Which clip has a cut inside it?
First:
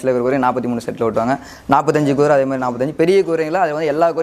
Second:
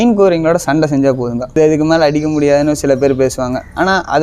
second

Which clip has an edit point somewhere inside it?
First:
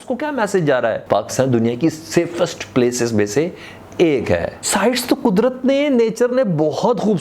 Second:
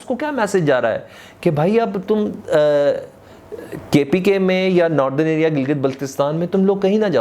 first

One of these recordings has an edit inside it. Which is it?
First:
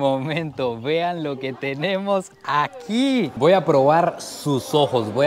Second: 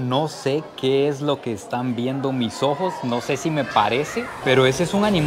first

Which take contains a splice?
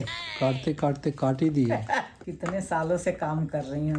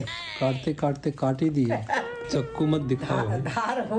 second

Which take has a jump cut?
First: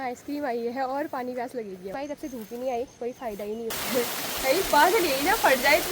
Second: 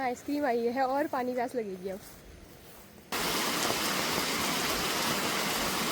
first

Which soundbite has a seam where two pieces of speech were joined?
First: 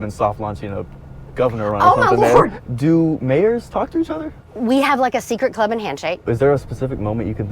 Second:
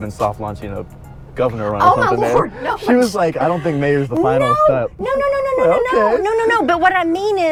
first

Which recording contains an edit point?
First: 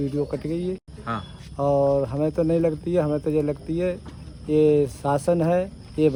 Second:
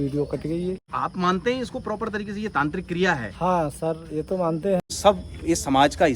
second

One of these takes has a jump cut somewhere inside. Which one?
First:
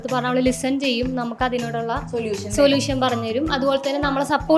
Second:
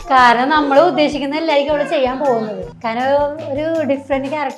second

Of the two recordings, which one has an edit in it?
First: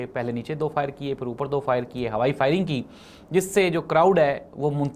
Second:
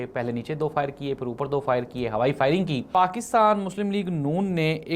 second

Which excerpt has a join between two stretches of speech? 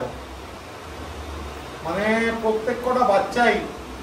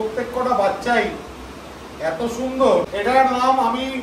second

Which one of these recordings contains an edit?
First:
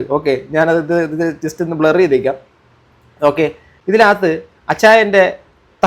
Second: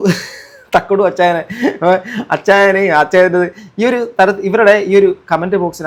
first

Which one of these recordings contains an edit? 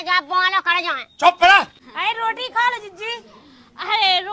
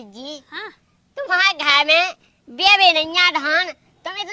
first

